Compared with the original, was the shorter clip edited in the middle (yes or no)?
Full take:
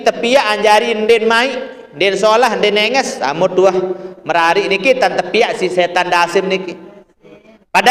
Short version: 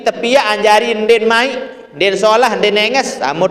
no